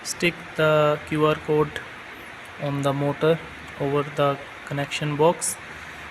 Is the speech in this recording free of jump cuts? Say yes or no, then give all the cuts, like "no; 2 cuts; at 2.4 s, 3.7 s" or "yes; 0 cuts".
yes; 0 cuts